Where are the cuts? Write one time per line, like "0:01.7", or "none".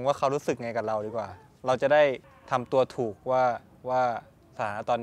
0:02.3